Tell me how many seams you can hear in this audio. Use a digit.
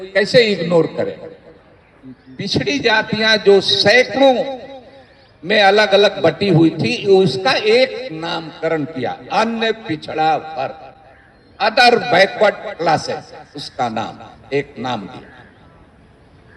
1